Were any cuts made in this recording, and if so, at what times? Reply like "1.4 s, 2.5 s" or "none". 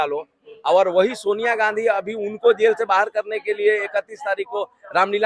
none